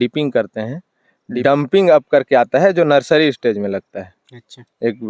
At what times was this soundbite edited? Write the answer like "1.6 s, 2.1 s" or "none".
1.4 s